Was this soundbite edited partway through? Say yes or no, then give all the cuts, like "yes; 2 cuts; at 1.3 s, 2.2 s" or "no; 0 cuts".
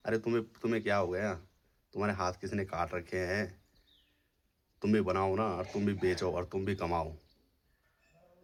no; 0 cuts